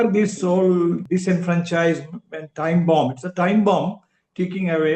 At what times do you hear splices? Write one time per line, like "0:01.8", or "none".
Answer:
0:01.0